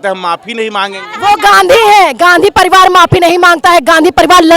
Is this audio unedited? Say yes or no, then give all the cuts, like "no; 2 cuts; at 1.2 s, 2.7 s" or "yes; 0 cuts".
no; 1 cut; at 1.0 s